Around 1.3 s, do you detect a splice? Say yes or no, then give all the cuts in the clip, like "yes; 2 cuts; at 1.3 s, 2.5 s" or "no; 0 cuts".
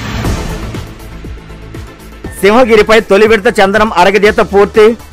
yes; 1 cut; at 1.3 s